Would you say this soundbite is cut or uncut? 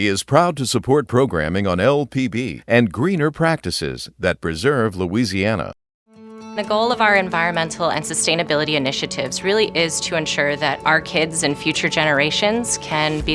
uncut